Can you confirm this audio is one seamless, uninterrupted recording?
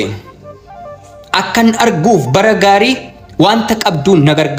yes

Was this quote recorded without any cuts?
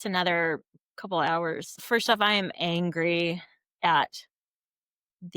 no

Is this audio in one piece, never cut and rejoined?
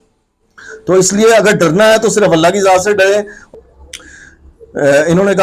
no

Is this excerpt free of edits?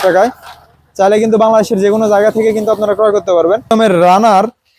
no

